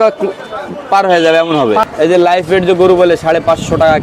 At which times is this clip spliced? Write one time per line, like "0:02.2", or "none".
0:01.8